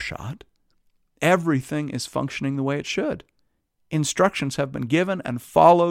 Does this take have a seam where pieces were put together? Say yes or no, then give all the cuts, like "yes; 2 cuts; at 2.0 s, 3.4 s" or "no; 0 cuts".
no; 0 cuts